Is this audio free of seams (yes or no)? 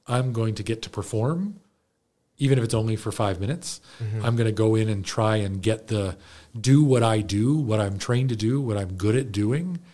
yes